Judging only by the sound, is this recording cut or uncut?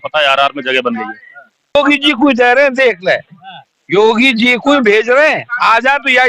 cut